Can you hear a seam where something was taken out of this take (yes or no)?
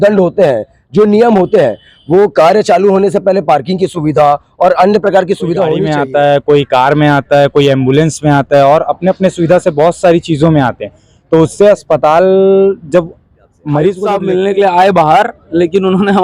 yes